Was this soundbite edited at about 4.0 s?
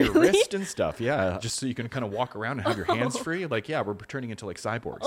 no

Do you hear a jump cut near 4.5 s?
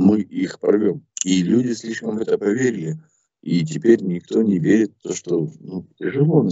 no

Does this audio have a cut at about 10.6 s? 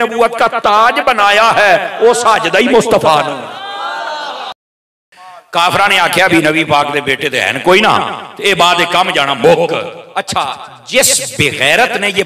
no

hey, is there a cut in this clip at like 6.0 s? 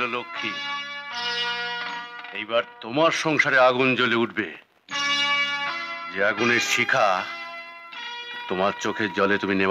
no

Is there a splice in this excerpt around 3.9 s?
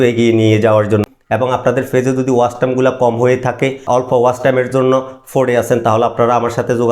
yes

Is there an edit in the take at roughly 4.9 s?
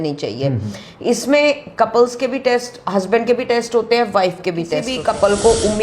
yes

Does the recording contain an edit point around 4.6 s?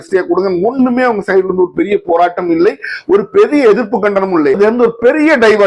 yes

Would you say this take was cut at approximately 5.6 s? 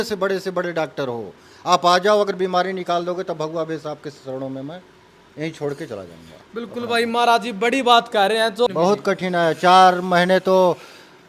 no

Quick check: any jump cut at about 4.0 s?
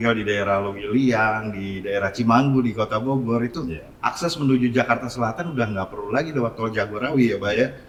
no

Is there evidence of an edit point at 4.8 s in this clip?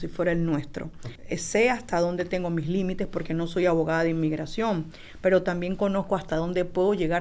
no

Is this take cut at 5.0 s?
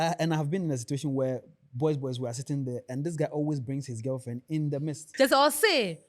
yes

